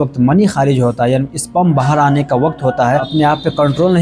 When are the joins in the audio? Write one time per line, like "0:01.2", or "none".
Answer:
0:03.1